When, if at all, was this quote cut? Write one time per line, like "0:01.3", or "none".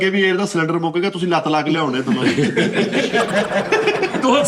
none